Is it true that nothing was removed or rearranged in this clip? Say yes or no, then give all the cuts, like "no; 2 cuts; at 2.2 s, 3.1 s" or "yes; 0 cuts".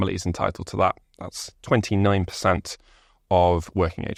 yes; 0 cuts